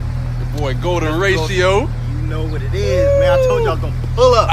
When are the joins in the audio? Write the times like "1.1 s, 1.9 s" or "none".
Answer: none